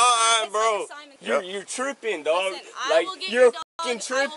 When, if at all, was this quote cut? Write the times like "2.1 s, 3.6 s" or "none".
1.1 s